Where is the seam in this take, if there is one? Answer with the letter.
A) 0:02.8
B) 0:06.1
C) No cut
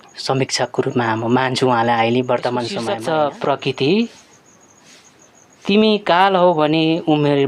A